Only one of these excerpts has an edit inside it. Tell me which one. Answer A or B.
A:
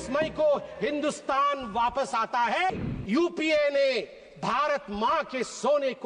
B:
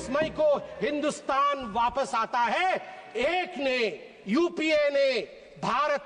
A